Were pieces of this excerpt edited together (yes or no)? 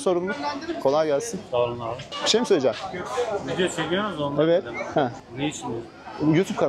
no